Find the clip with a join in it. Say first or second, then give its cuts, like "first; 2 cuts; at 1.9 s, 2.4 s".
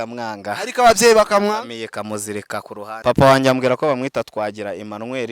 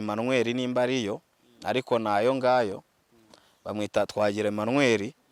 first; 1 cut; at 2.9 s